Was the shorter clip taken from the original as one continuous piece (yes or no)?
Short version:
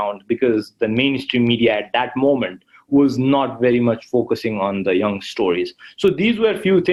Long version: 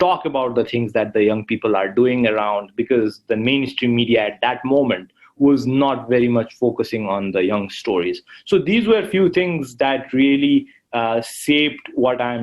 yes